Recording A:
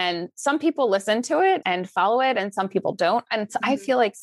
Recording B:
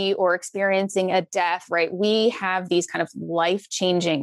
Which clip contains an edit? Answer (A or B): A